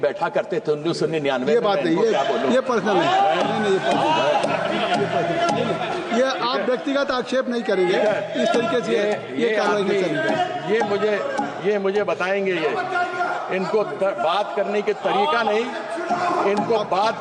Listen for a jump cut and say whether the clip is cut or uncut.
uncut